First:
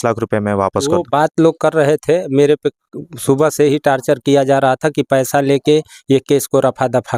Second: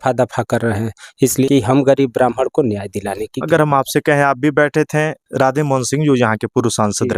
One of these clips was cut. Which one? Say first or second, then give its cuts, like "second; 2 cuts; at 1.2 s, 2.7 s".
second; 1 cut; at 1.4 s